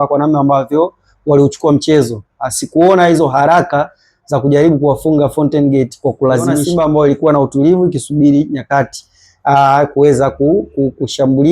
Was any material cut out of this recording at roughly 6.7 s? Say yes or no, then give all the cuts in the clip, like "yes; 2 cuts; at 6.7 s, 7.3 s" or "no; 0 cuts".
yes; 1 cut; at 6.7 s